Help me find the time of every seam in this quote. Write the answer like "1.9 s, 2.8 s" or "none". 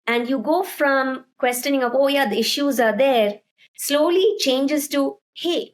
none